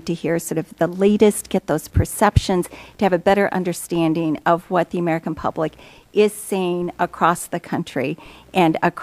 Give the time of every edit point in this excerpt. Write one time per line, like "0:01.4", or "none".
0:06.5